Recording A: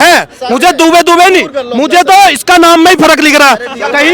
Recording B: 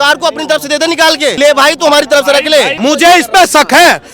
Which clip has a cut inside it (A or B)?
B